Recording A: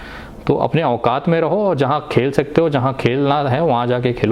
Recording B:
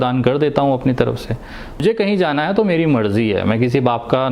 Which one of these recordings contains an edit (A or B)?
B